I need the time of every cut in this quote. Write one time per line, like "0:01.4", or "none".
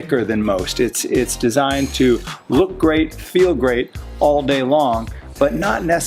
none